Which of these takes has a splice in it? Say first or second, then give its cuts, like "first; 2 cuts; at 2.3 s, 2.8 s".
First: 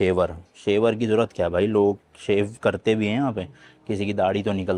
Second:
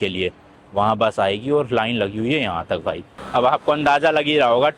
second; 1 cut; at 3.1 s